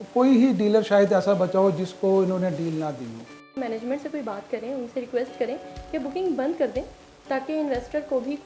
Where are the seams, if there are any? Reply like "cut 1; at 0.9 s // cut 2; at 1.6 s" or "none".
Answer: cut 1; at 3.5 s